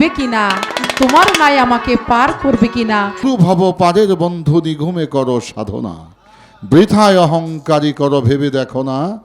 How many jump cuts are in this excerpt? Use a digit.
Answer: 1